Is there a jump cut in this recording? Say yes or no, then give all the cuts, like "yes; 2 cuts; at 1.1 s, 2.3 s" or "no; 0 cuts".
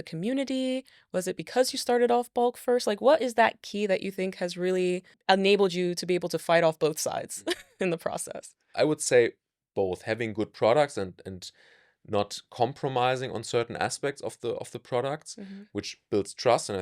yes; 2 cuts; at 5.1 s, 8.6 s